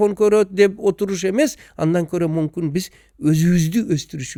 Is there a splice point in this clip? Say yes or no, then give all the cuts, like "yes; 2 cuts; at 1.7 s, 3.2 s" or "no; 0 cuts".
no; 0 cuts